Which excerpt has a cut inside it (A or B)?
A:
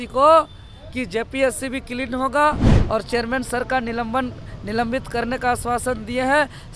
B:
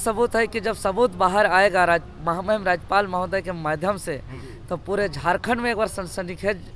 A